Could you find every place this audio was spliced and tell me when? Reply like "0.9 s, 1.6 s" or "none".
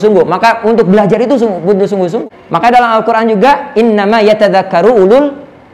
2.2 s

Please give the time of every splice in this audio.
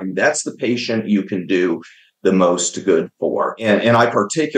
3.6 s

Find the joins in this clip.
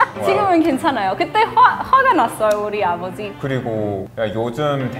3.3 s

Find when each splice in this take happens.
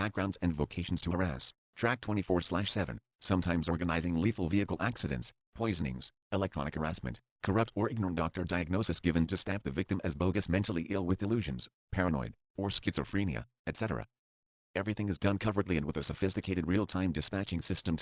2.2 s, 7.3 s, 16.0 s

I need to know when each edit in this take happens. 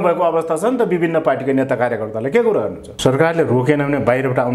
2.8 s

